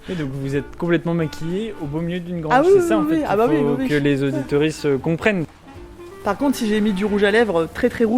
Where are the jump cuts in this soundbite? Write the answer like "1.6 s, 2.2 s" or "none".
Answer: 5.5 s